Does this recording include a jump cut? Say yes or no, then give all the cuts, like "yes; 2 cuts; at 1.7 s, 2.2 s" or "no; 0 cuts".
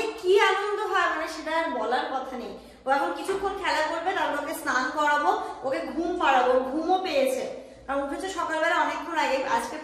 no; 0 cuts